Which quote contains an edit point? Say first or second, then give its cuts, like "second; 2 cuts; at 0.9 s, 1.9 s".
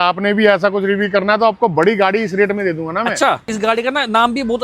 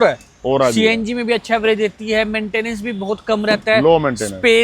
first; 1 cut; at 3.5 s